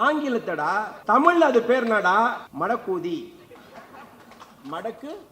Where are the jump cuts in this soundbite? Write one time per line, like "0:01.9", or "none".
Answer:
0:00.9
0:02.5